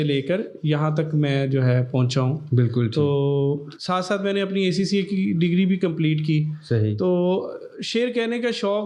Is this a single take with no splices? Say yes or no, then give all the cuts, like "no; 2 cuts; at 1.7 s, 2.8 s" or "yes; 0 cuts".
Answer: yes; 0 cuts